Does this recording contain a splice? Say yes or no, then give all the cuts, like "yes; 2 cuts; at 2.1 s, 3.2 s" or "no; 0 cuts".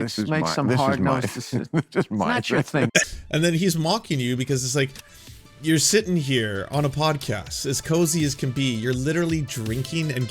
yes; 1 cut; at 3.0 s